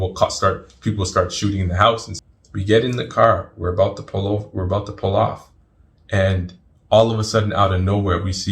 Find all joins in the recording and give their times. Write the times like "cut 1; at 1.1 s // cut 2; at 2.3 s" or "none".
cut 1; at 2.1 s